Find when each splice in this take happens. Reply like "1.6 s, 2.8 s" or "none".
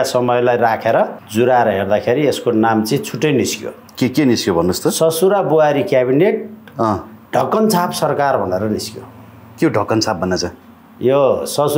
1.2 s